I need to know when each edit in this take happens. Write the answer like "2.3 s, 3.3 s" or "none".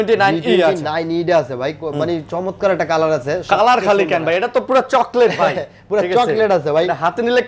none

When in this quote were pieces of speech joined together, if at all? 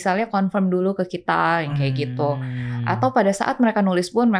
none

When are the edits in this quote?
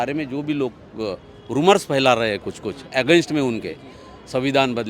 none

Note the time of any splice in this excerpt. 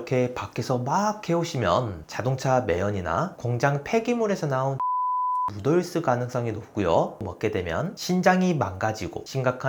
7.3 s

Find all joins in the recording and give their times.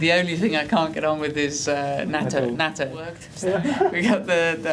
3.2 s

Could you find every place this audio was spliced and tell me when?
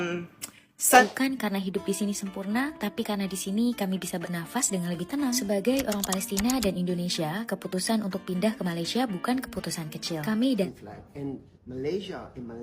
1.0 s, 10.7 s

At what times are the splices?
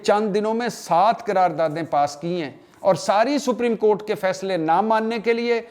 none

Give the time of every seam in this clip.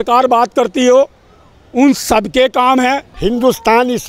3.1 s

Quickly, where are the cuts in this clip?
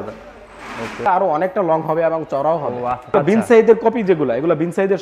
1.1 s, 3.1 s

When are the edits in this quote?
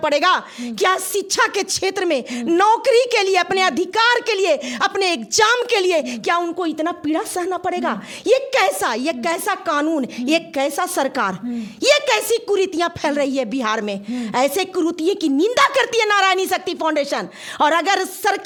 none

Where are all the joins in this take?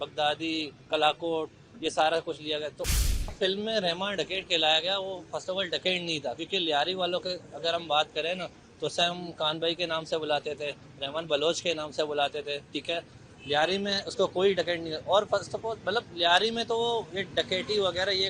3.3 s

